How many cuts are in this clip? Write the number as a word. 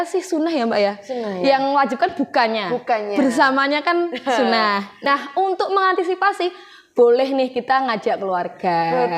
one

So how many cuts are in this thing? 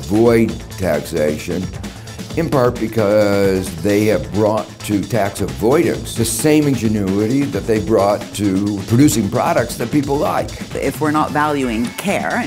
three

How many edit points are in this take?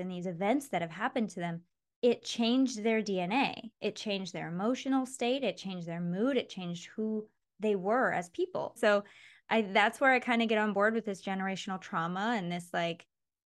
one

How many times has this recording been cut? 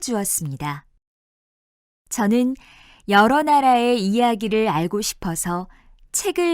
one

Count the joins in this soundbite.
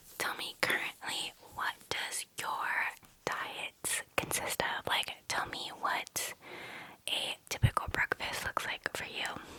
zero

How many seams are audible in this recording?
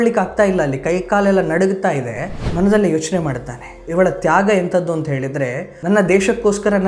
one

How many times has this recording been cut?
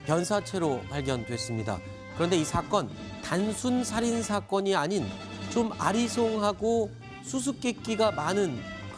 zero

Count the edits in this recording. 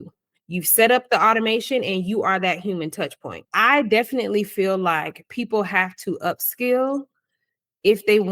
one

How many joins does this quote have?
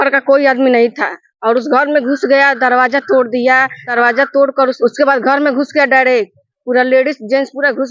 two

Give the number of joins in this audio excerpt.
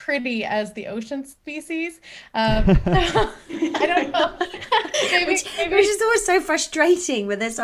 zero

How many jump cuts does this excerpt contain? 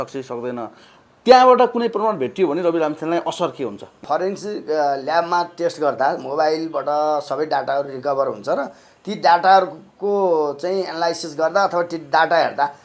one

